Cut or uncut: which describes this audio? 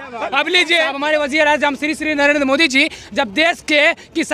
cut